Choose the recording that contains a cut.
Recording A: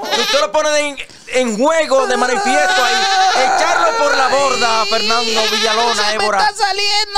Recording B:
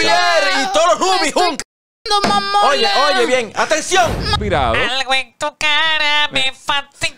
B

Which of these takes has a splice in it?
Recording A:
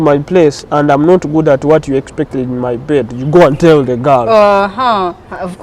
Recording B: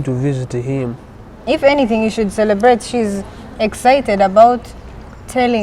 B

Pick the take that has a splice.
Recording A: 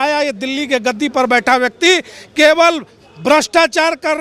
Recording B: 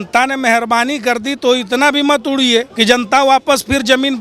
B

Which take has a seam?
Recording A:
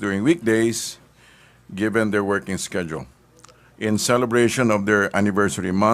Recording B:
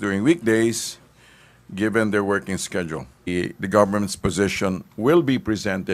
A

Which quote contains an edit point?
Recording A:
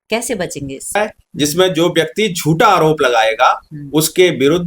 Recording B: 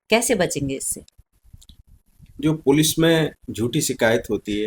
A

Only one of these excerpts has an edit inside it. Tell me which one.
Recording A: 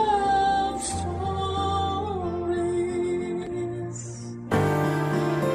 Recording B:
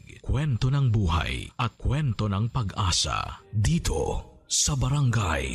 A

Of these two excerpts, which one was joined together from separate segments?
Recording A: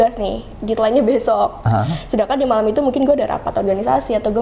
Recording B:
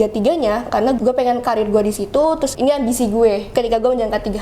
B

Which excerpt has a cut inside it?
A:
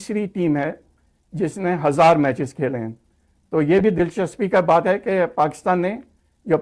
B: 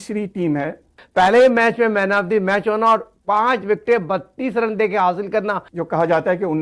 B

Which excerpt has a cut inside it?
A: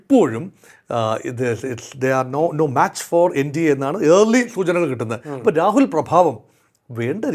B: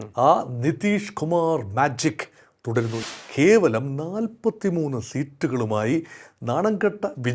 B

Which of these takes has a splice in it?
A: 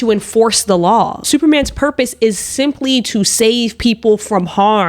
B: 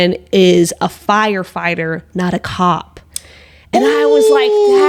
A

